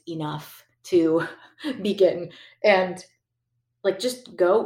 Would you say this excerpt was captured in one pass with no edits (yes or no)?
yes